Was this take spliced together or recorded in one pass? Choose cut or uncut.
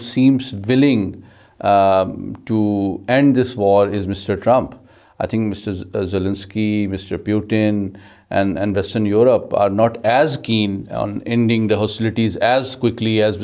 uncut